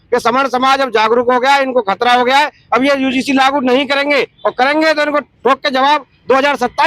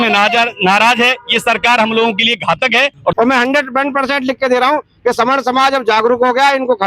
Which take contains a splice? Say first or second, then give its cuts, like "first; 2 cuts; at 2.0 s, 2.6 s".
second; 1 cut; at 3.1 s